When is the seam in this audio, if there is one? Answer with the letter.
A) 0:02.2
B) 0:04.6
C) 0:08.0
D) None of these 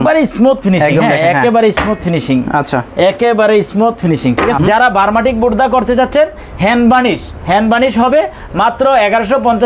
B